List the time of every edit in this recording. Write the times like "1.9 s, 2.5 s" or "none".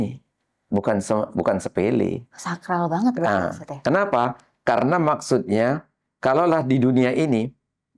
none